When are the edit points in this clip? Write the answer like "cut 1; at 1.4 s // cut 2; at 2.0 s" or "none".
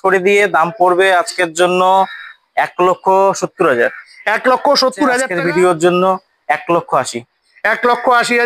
cut 1; at 5.3 s